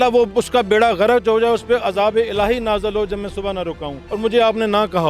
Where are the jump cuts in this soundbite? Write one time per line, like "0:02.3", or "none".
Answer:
0:03.9